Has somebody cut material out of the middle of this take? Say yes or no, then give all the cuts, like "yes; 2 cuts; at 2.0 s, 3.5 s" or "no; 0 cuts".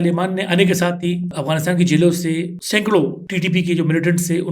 yes; 3 cuts; at 1.3 s, 2.6 s, 3.2 s